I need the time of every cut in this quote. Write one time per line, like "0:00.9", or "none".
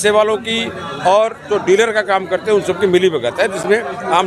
none